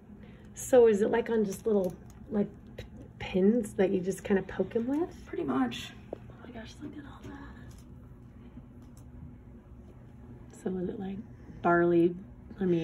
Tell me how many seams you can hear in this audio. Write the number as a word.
zero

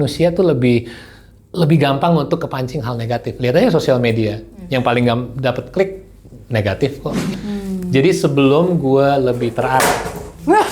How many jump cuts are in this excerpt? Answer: one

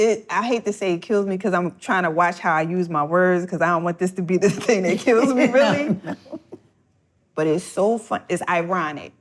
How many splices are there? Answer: zero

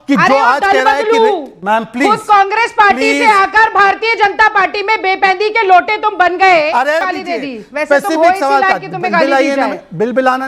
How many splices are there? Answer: one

